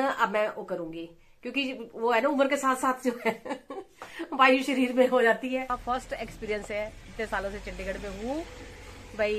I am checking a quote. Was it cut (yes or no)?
yes